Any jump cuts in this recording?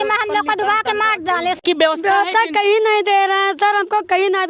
yes; 1 cut; at 1.6 s

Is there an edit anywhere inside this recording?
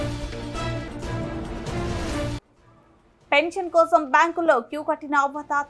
no; 0 cuts

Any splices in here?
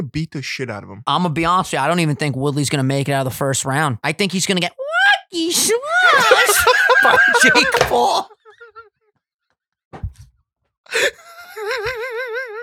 yes; 2 cuts; at 1.0 s, 4.0 s

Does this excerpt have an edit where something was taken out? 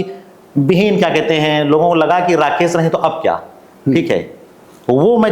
no; 0 cuts

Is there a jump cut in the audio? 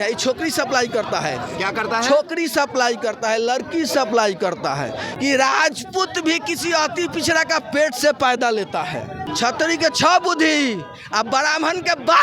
yes; 2 cuts; at 5.0 s, 9.3 s

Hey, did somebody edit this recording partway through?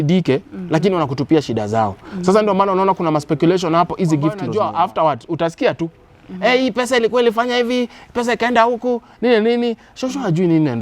yes; 1 cut; at 4.4 s

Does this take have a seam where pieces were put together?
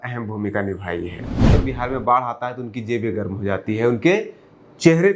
yes; 1 cut; at 1.5 s

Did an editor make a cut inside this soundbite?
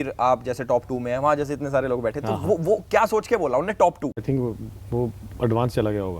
yes; 1 cut; at 4.2 s

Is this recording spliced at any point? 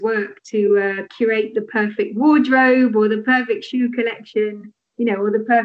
no; 0 cuts

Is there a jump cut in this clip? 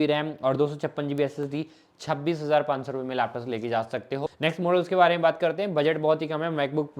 yes; 1 cut; at 4.2 s

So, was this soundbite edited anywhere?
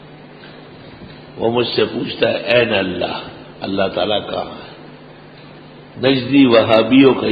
no; 0 cuts

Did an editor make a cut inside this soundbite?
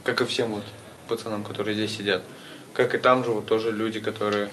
yes; 1 cut; at 1.2 s

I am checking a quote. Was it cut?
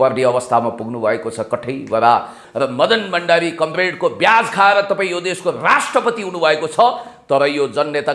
yes; 1 cut; at 2.4 s

